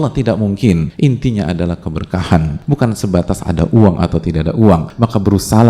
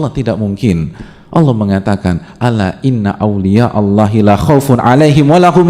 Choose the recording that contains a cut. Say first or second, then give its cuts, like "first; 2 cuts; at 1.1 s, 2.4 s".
first; 3 cuts; at 0.9 s, 2.6 s, 4.9 s